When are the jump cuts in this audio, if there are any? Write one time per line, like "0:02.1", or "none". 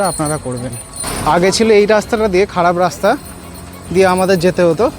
0:01.1